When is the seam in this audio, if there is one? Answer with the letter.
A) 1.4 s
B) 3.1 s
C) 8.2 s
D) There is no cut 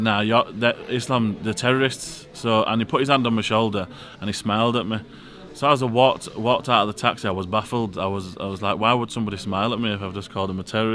D